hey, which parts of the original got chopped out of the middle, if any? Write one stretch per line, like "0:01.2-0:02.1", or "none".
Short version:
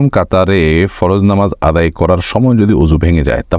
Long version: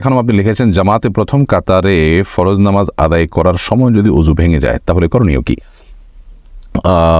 none